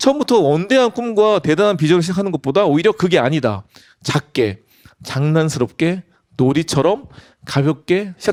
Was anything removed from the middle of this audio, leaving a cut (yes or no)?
no